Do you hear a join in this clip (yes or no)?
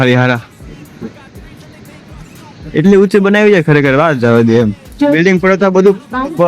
yes